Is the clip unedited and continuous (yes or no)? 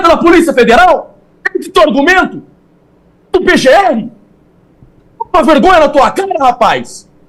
yes